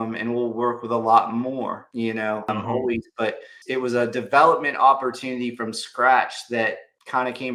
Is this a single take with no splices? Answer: yes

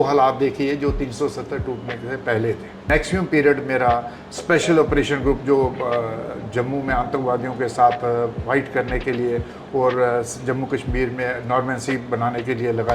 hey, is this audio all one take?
no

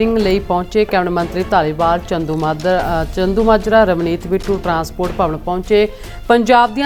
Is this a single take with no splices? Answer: yes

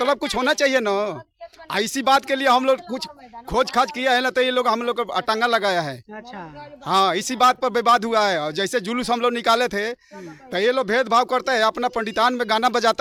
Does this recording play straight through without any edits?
yes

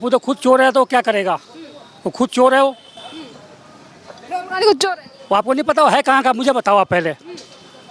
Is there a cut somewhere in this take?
no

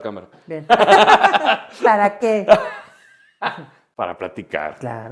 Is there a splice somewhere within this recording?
no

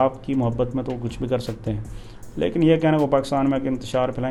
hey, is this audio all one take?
yes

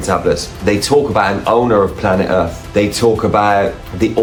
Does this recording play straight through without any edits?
yes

